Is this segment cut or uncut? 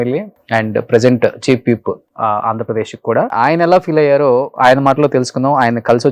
cut